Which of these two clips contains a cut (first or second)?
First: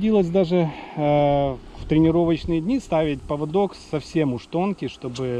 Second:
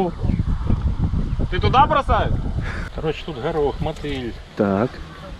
second